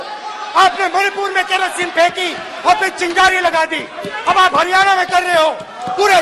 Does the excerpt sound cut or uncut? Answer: uncut